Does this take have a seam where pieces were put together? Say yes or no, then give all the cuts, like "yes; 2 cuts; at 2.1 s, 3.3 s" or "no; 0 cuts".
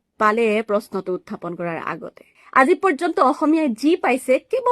yes; 1 cut; at 2.4 s